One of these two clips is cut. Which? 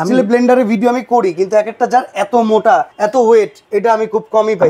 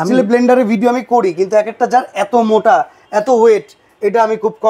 first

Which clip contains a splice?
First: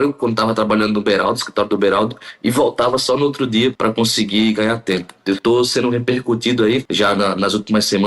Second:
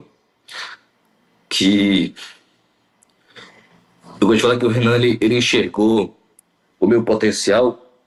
first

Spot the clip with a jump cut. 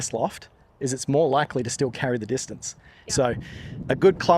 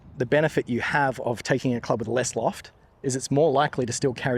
first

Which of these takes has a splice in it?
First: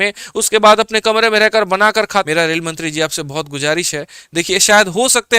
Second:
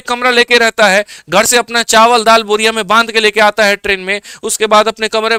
first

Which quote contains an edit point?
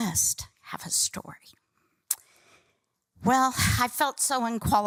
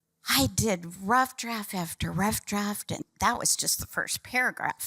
second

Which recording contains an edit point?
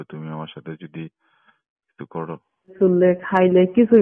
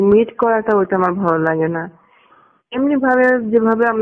first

